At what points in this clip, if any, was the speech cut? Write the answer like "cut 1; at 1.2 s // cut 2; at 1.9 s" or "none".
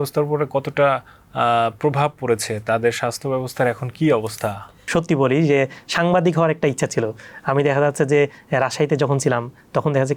cut 1; at 4.8 s